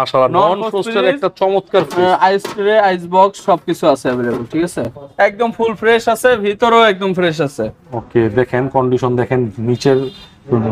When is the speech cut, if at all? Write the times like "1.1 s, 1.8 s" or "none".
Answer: 5.0 s